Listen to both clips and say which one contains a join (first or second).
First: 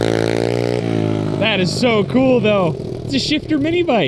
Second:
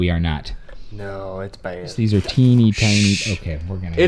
second